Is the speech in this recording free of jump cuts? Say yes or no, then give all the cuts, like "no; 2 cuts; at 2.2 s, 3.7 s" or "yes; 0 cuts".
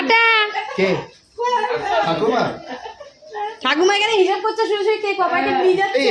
yes; 0 cuts